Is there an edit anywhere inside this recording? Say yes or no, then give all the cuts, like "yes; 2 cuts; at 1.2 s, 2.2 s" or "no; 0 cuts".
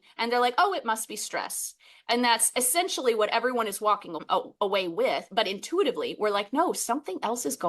yes; 1 cut; at 4.2 s